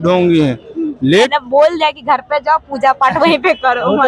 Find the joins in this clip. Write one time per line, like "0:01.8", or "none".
0:01.3